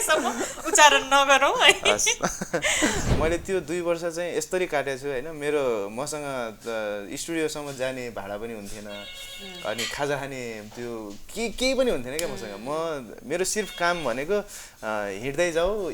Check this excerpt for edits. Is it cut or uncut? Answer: cut